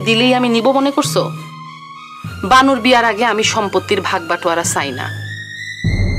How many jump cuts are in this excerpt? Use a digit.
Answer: 0